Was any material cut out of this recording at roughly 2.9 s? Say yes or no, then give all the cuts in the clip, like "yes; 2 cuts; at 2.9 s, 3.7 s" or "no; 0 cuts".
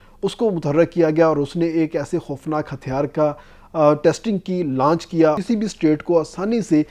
no; 1 cut; at 5.4 s